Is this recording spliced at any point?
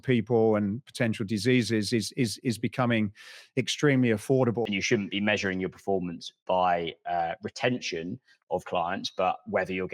yes; 1 cut; at 4.7 s

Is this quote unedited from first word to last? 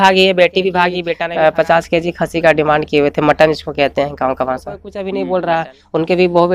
no; 2 cuts; at 1.1 s, 4.9 s

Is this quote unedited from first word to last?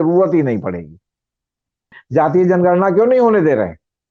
no; 1 cut; at 2.0 s

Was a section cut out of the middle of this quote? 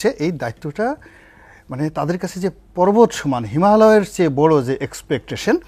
no; 0 cuts

